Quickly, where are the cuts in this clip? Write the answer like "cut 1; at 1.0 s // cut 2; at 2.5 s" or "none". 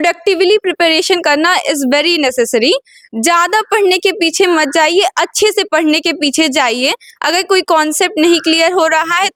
none